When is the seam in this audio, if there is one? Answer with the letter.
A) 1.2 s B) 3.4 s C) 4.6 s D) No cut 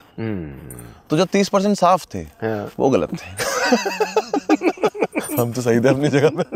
D